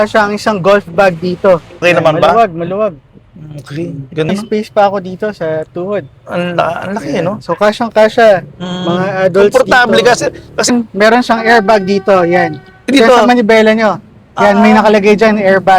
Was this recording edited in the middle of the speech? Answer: yes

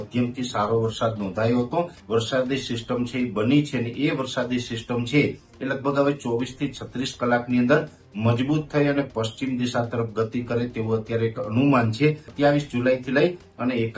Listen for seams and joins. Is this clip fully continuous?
no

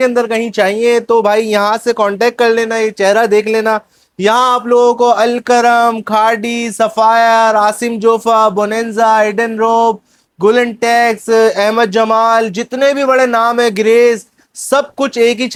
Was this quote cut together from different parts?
no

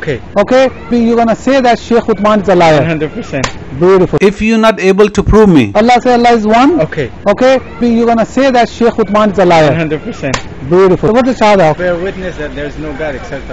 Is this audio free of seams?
no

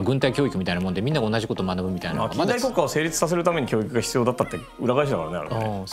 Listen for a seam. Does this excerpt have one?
no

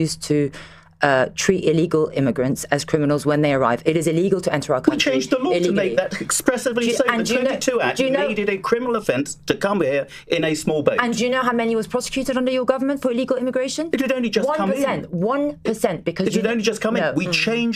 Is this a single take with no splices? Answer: yes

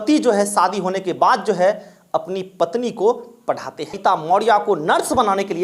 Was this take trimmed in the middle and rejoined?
yes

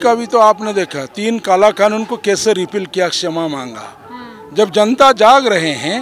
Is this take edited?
no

